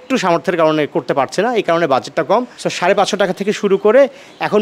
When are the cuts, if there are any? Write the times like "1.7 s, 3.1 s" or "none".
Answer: 2.6 s